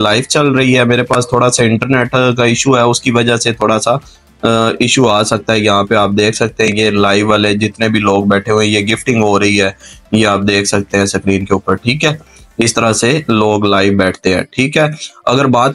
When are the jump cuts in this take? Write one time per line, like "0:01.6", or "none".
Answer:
none